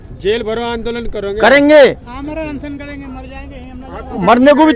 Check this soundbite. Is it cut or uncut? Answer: uncut